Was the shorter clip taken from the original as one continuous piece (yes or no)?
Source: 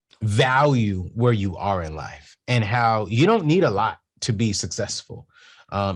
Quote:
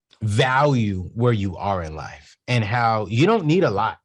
yes